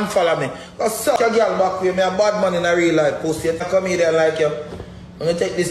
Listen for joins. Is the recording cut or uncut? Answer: cut